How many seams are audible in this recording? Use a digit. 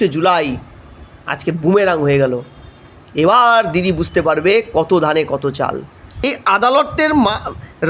1